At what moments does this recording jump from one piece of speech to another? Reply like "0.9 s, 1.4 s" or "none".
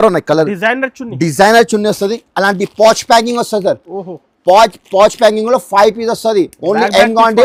none